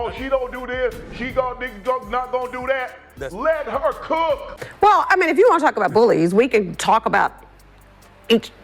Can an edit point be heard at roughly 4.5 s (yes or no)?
yes